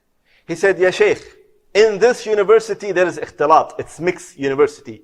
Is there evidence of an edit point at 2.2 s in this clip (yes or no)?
no